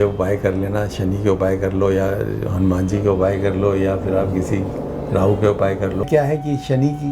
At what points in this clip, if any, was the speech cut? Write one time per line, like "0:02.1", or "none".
0:06.1